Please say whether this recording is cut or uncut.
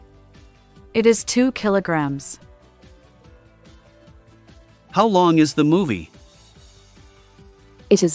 cut